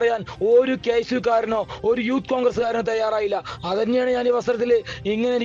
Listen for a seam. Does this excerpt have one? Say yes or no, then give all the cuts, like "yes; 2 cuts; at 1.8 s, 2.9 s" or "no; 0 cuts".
no; 0 cuts